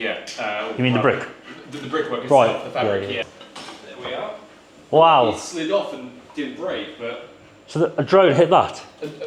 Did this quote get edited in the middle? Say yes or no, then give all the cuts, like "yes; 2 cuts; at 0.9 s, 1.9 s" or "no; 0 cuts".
yes; 1 cut; at 3.2 s